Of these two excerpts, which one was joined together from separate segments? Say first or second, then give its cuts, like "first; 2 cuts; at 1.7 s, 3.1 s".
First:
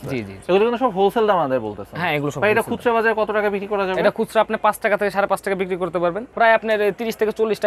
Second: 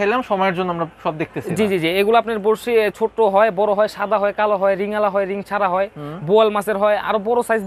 first; 1 cut; at 6.2 s